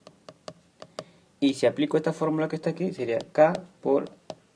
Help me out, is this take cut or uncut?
cut